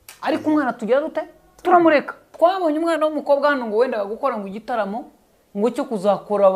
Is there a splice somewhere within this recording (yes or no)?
yes